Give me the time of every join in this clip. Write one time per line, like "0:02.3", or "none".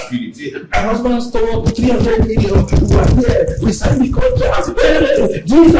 none